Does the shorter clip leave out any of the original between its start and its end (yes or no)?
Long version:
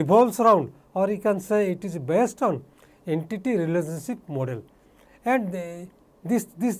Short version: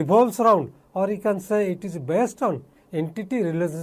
yes